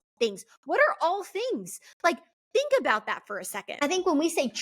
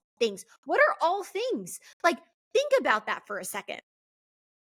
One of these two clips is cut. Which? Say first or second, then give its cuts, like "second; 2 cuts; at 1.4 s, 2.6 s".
first; 1 cut; at 3.6 s